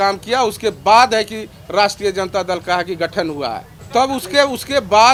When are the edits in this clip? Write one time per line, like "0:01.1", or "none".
none